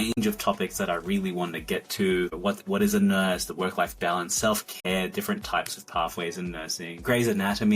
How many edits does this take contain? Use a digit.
1